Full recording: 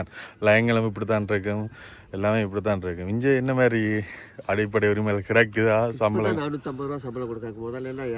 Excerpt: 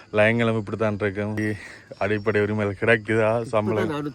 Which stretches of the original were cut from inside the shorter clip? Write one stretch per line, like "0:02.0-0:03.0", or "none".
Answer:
0:01.7-0:03.9